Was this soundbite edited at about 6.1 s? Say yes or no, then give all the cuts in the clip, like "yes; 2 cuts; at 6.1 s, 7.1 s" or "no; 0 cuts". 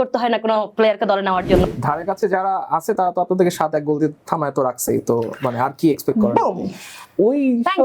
no; 1 cut; at 1.7 s